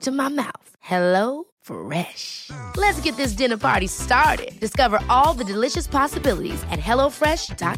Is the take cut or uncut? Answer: uncut